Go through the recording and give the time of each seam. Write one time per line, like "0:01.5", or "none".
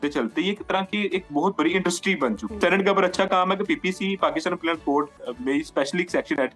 0:02.6
0:05.1